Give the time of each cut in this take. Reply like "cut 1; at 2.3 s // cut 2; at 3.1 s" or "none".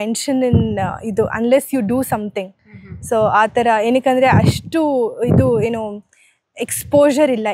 none